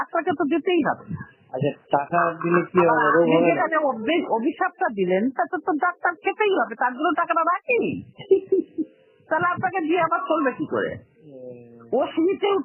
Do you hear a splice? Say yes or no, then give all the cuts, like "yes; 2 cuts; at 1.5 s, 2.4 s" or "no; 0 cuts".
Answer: no; 0 cuts